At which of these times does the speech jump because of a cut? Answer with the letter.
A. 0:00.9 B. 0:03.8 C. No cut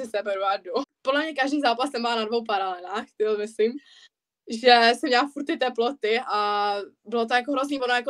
A